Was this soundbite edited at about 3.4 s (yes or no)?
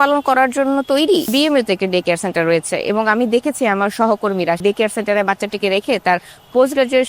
no